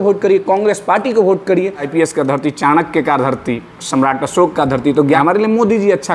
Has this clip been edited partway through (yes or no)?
yes